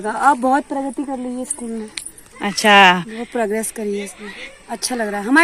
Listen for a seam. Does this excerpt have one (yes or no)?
no